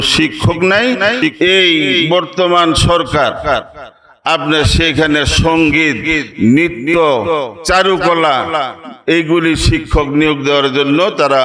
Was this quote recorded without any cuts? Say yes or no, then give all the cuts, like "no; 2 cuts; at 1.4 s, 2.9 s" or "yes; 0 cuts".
no; 1 cut; at 1.2 s